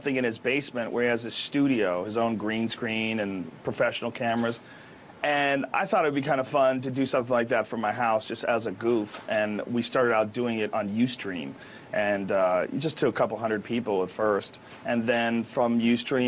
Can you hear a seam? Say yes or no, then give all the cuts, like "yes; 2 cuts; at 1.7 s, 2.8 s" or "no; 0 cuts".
yes; 1 cut; at 2.7 s